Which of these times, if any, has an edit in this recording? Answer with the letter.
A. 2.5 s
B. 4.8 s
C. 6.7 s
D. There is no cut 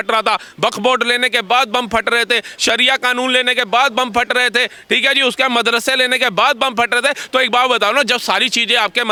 D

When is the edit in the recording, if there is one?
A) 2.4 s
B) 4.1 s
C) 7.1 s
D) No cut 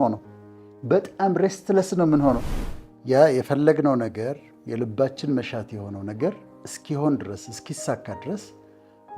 A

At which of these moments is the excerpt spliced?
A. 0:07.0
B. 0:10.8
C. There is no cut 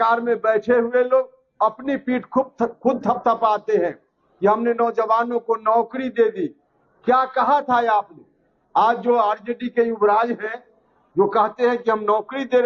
C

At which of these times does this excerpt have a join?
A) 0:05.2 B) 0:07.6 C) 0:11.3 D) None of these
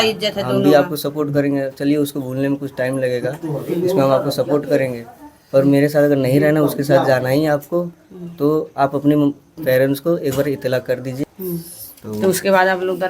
C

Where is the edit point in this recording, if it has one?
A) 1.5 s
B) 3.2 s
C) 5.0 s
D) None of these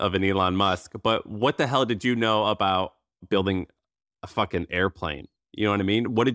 B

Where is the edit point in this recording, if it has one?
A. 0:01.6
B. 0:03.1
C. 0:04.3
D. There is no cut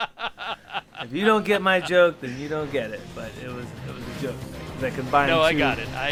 D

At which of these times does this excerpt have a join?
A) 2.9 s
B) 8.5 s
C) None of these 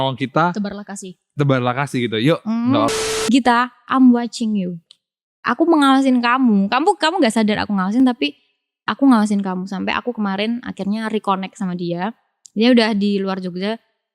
A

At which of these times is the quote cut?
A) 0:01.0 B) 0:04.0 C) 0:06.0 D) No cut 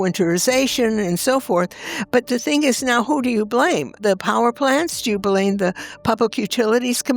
B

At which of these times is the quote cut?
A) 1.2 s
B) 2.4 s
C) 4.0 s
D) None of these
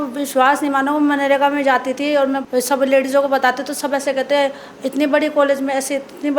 B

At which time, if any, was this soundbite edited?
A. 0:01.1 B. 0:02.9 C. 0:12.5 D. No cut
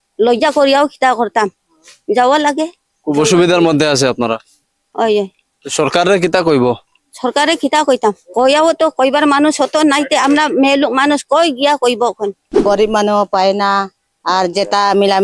C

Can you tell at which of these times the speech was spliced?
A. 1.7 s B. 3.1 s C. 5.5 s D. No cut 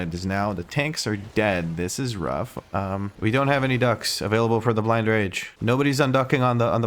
B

